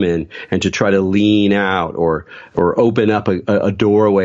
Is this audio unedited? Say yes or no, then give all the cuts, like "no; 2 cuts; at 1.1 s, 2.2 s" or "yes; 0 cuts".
no; 1 cut; at 2.5 s